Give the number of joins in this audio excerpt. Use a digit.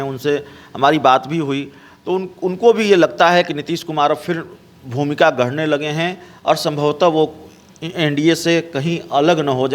0